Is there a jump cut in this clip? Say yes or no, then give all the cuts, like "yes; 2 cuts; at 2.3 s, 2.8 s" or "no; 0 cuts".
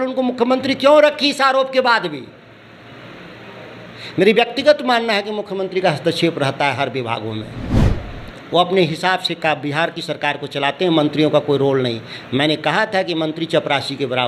no; 0 cuts